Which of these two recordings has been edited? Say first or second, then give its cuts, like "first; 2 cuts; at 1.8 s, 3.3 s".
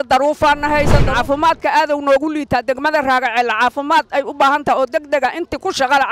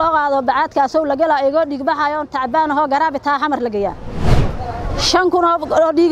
first; 1 cut; at 1.1 s